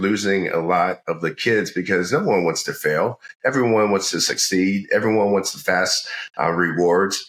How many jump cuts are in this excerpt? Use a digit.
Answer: 0